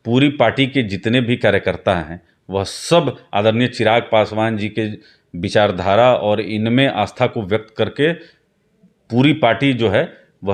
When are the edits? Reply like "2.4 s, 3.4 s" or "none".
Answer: none